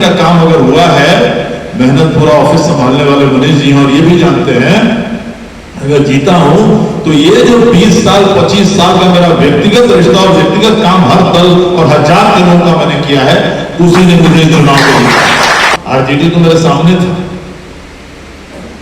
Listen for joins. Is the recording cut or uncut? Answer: cut